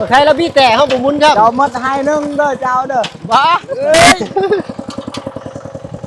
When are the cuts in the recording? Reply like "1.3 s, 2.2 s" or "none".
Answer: 3.7 s